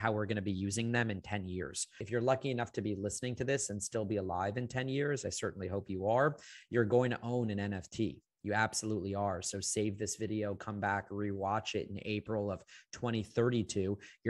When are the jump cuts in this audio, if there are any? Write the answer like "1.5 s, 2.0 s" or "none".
2.0 s